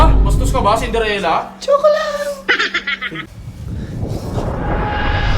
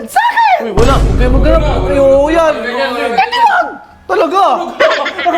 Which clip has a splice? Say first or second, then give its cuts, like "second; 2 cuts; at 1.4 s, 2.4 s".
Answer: first; 1 cut; at 3.1 s